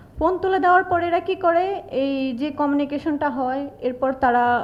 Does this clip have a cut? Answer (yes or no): no